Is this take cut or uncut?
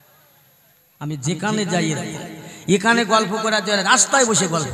cut